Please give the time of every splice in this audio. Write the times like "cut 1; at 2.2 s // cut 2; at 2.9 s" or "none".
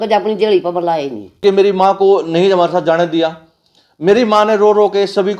cut 1; at 1.4 s